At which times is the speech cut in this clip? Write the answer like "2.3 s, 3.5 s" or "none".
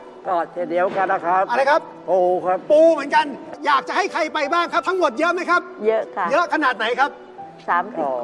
3.5 s